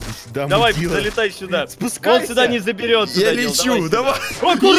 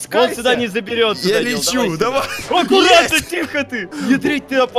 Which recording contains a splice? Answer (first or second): second